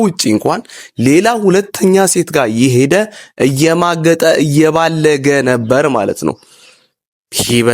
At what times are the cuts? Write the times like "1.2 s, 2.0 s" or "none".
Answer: none